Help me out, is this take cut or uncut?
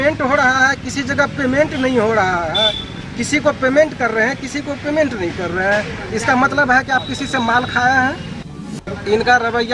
cut